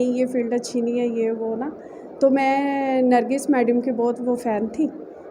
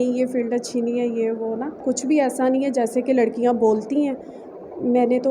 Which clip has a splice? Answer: second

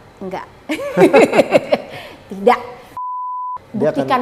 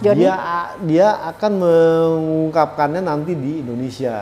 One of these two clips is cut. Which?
first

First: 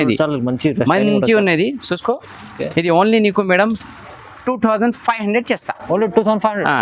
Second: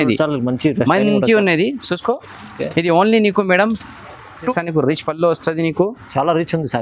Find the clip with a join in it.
second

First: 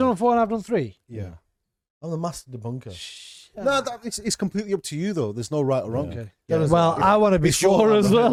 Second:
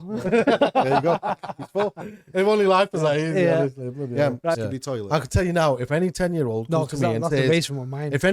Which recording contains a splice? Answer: second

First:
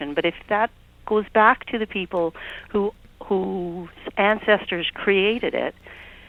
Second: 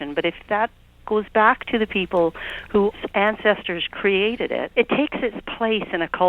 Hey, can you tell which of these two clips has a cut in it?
second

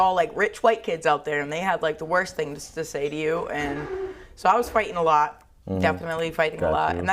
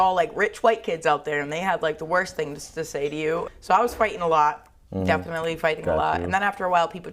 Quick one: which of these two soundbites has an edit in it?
second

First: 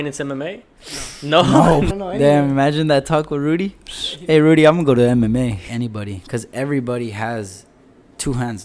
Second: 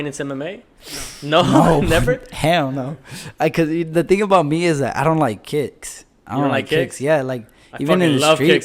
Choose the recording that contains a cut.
first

